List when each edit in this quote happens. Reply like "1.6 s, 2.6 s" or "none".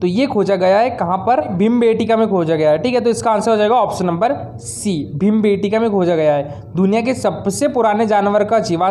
1.5 s